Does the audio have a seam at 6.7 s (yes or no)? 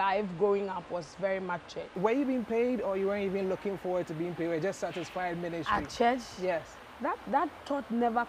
no